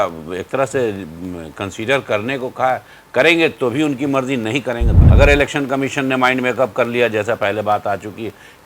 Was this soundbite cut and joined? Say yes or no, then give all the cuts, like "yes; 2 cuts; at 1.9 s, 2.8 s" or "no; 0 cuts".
yes; 1 cut; at 5.0 s